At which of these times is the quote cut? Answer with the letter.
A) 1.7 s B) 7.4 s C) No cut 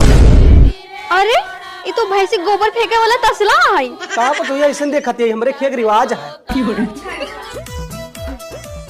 B